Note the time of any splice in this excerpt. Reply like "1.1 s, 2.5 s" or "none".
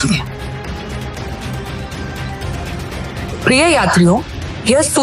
1.2 s